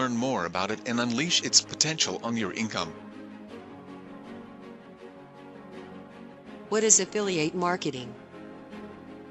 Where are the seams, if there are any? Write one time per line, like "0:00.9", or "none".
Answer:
0:02.9
0:06.6
0:08.0